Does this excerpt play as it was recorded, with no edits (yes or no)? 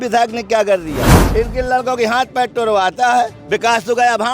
no